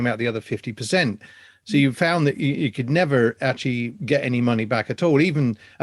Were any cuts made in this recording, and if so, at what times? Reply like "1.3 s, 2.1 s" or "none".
none